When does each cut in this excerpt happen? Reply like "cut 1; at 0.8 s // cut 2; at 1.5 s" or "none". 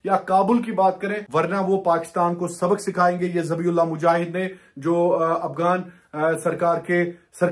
cut 1; at 1.2 s